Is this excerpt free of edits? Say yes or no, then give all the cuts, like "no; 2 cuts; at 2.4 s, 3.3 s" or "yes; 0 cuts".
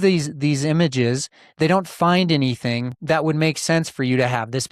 no; 1 cut; at 2.9 s